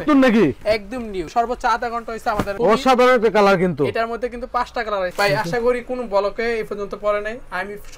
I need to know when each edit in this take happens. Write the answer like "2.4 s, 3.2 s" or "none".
5.1 s